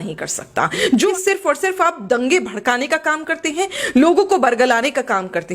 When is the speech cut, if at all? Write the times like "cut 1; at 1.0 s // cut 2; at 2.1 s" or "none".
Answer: cut 1; at 1.1 s